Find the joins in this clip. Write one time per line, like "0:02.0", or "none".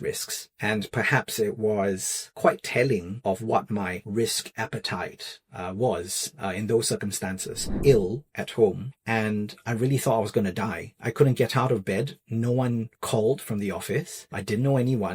0:07.7